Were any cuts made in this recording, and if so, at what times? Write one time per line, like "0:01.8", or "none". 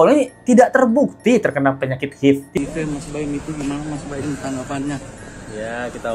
0:02.5